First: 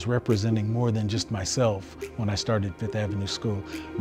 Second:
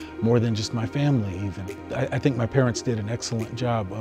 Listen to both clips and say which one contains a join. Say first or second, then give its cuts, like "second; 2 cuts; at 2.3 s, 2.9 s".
second; 1 cut; at 1.8 s